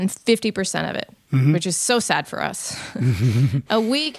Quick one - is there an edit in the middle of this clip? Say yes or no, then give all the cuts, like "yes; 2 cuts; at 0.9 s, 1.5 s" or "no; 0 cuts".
no; 0 cuts